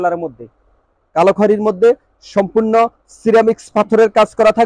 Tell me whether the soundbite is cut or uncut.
uncut